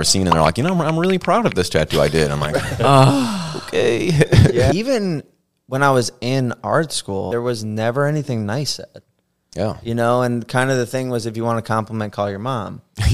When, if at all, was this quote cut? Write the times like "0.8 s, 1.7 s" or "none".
4.7 s, 7.3 s